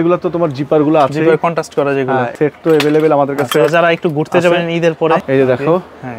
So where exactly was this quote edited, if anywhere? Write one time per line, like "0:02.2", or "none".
0:02.3
0:05.2